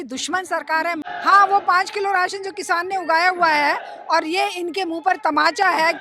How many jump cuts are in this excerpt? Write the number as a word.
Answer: one